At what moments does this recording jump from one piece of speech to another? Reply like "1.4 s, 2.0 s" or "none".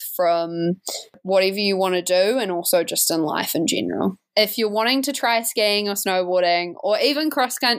1.2 s, 4.2 s

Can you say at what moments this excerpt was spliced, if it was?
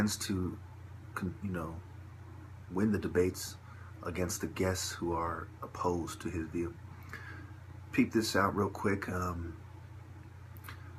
none

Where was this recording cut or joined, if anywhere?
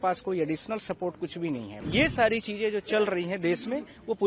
1.7 s

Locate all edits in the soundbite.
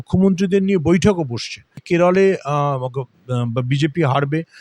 1.8 s

